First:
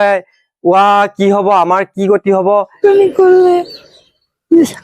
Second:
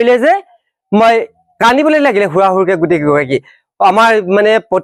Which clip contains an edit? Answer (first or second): first